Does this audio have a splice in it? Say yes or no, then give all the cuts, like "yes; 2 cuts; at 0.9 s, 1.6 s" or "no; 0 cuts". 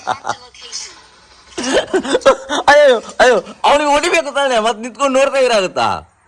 no; 0 cuts